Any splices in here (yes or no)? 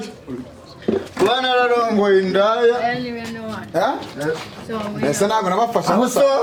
no